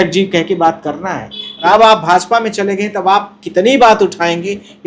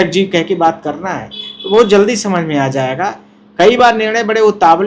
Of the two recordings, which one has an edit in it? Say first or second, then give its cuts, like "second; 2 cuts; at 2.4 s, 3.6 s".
first; 1 cut; at 1.6 s